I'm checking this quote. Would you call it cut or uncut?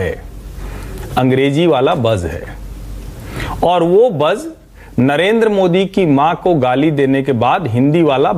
uncut